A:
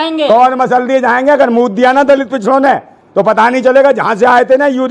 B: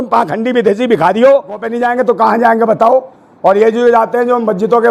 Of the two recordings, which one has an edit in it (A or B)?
B